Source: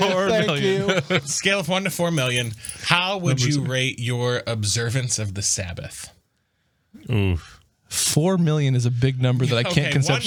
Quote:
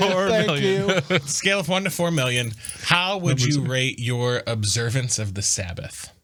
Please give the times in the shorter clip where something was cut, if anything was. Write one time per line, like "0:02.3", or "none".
none